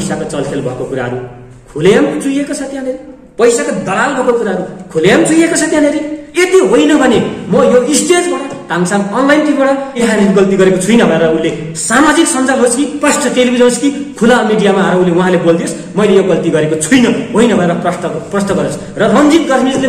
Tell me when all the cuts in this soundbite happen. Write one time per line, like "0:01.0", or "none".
0:10.0